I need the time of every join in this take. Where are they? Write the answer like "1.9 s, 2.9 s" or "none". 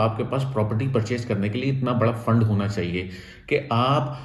none